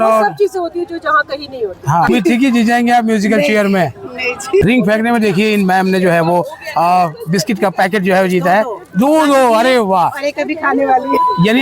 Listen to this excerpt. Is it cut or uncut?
cut